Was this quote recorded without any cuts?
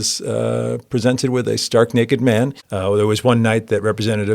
no; 1 cut; at 2.6 s

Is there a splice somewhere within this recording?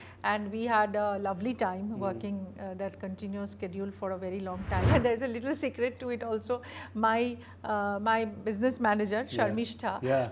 yes; 1 cut; at 4.9 s

